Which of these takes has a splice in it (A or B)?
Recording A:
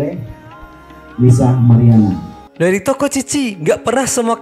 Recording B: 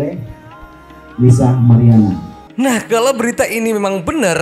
A